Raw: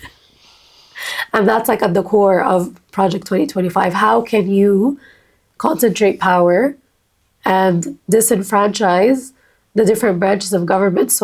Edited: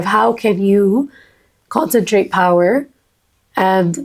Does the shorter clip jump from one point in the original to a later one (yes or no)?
no